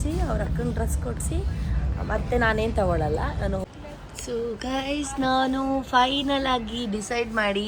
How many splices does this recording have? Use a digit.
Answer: 1